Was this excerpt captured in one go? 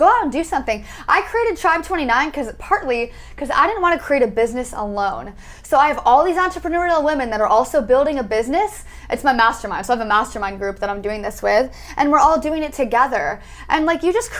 yes; 0 cuts

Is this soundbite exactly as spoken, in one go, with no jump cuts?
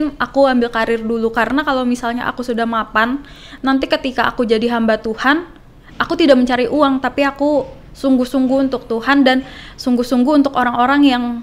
yes; 0 cuts

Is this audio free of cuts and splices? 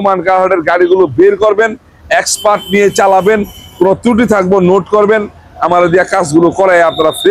yes; 0 cuts

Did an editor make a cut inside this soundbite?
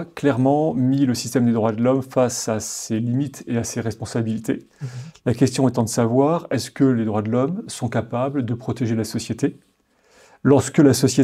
no; 0 cuts

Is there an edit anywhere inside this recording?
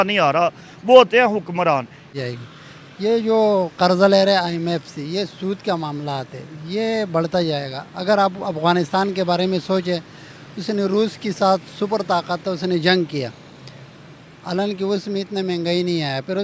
yes; 1 cut; at 2.1 s

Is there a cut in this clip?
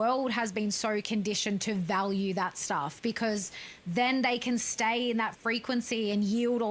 no; 0 cuts

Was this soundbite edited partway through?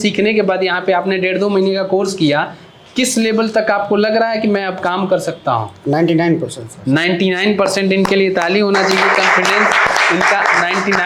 no; 0 cuts

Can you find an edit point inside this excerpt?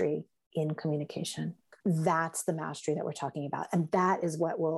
yes; 1 cut; at 1.7 s

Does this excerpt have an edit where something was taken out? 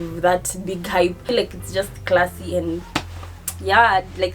yes; 1 cut; at 1.2 s

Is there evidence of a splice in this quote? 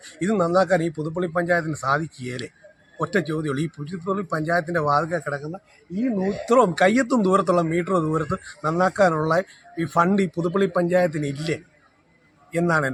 no; 0 cuts

